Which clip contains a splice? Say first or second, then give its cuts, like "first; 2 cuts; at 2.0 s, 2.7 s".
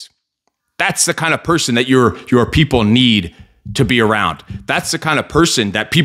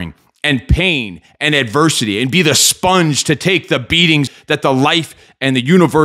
second; 1 cut; at 4.3 s